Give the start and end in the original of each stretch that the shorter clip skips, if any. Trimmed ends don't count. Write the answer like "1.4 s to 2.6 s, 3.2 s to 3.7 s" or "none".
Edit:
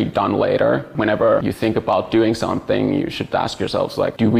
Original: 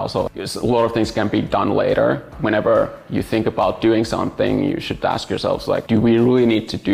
2.5 s to 2.8 s